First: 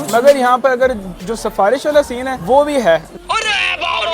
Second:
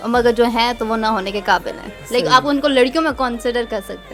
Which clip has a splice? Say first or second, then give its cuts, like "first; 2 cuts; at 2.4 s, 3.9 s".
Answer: first; 2 cuts; at 2.3 s, 3.1 s